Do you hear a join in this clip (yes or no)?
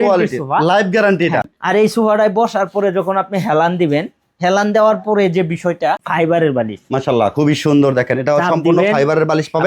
yes